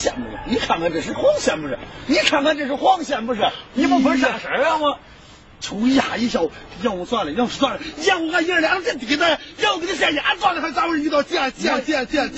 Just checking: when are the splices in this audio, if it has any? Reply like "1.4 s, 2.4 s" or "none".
none